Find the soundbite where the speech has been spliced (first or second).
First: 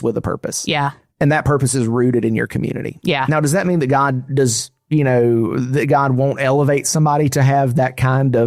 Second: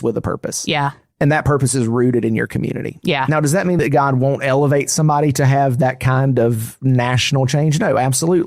second